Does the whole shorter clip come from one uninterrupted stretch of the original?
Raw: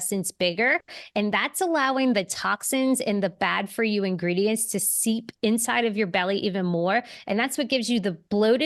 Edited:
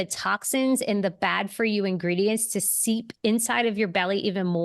yes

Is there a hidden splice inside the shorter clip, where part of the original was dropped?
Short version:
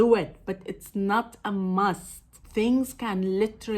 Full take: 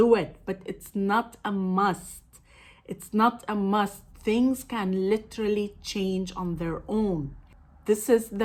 yes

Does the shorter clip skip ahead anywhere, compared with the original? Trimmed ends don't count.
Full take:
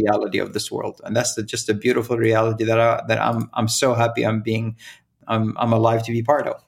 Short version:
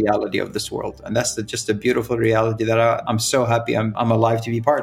yes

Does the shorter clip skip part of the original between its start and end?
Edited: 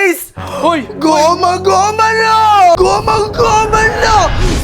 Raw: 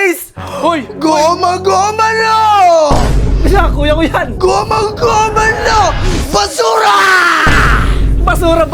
yes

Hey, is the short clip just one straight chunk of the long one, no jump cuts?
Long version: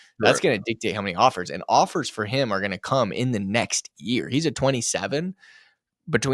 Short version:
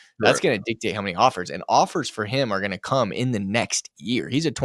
yes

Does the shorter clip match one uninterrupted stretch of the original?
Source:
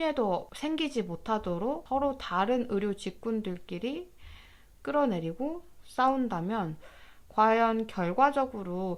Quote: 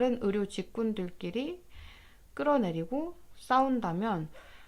yes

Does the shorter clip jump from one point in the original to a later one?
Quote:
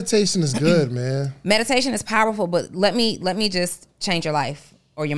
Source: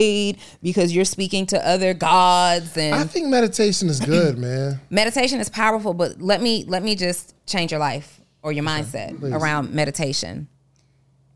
no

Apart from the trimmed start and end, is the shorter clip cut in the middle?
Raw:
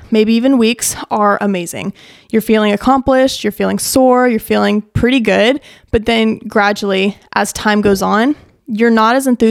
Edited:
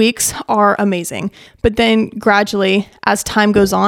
yes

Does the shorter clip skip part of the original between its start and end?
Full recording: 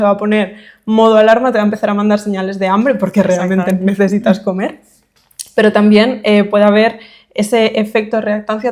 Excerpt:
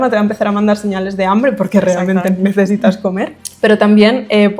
yes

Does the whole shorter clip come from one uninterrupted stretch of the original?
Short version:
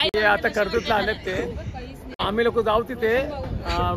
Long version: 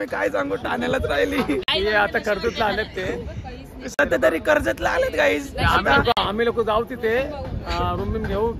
no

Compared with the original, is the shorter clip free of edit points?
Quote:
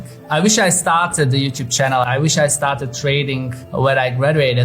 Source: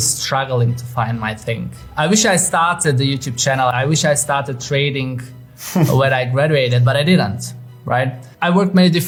no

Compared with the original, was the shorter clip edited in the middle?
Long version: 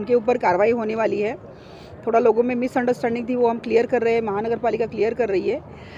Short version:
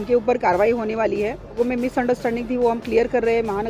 yes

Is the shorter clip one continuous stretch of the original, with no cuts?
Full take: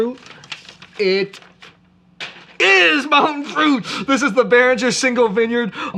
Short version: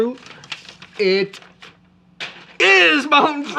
yes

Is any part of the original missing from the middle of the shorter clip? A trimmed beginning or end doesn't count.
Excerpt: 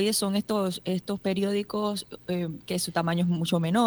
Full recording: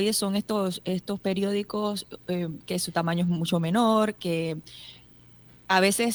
no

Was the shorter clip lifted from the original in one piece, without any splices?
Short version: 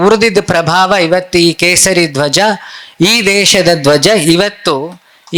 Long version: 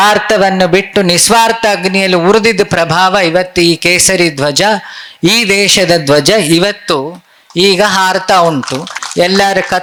yes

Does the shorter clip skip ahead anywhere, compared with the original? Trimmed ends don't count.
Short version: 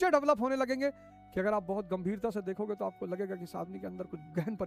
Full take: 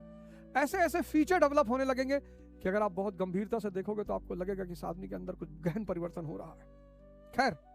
no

